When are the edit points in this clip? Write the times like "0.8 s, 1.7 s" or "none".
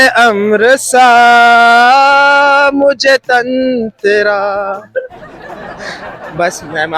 none